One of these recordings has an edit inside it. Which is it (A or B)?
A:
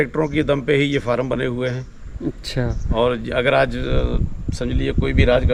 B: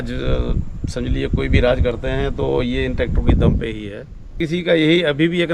B